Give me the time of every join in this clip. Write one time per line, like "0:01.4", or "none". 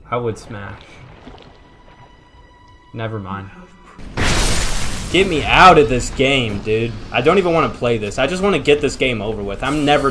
0:04.0